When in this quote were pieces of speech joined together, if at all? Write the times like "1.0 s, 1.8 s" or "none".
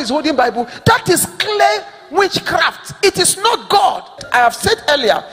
4.2 s

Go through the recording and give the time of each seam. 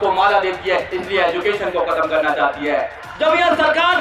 3.0 s

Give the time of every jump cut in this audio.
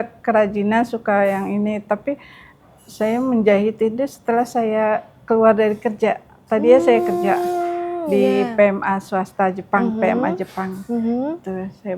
none

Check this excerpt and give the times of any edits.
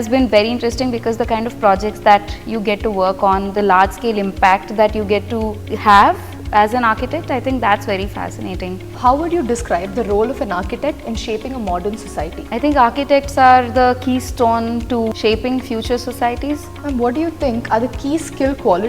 5.6 s, 8.9 s, 12.4 s, 15.1 s, 16.7 s

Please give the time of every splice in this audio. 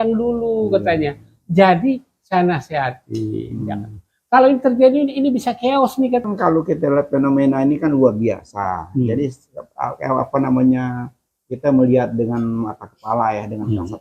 6.2 s

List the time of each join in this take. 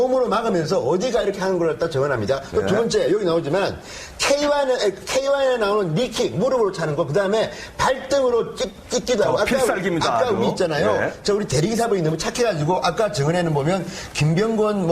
3.4 s

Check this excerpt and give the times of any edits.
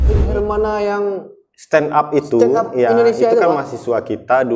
none

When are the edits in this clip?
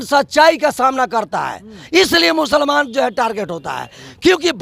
none

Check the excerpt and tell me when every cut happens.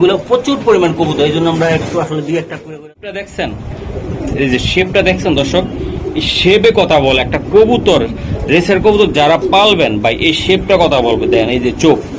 2.6 s

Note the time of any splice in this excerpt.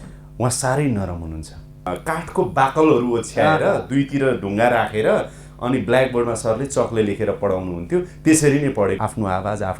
1.9 s, 9.0 s

